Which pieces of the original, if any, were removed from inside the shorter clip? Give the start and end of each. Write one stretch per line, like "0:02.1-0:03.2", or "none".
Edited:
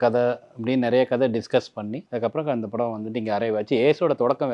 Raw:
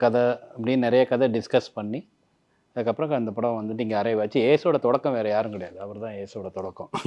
0:02.0-0:02.7